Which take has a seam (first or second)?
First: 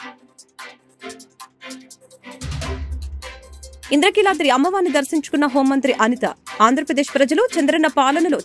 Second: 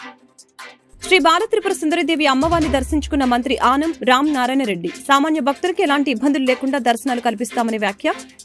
second